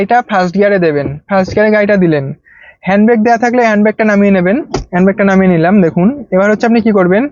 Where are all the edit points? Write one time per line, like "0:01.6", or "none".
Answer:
none